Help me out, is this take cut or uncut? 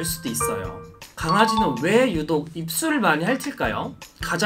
cut